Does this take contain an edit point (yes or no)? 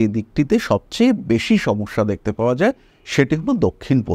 no